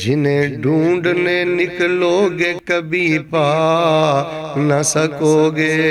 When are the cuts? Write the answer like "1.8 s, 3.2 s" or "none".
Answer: none